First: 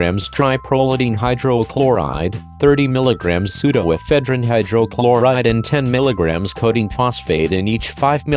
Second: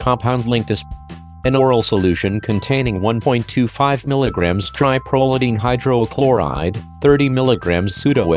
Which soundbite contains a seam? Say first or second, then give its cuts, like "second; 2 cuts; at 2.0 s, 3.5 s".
second; 1 cut; at 0.9 s